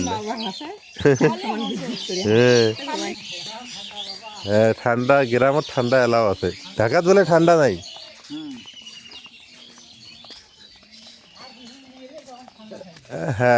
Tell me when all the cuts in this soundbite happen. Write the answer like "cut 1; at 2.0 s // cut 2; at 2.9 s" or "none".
cut 1; at 3.1 s